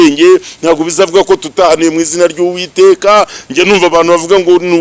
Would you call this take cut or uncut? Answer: uncut